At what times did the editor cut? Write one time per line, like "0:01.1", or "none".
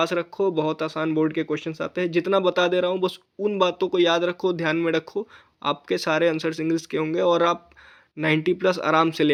none